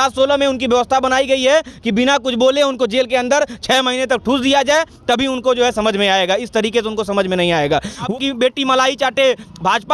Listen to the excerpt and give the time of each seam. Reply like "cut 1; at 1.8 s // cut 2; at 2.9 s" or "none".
cut 1; at 8.1 s